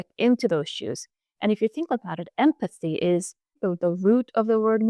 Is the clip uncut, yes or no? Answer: no